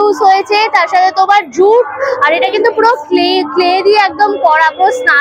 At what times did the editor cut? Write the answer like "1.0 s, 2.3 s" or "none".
none